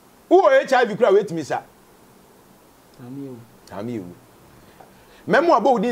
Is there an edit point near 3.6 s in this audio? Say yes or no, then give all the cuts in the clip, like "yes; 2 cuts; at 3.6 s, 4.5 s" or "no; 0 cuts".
no; 1 cut; at 4.8 s